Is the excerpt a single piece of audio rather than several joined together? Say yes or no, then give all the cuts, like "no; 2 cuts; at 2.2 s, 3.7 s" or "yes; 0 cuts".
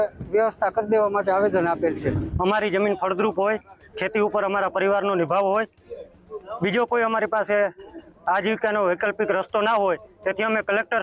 no; 1 cut; at 2.3 s